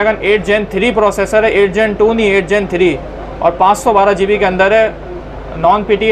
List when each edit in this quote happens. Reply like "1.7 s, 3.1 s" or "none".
none